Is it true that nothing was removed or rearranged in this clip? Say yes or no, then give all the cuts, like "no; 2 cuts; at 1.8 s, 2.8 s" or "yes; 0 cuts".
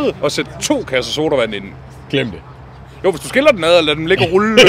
yes; 0 cuts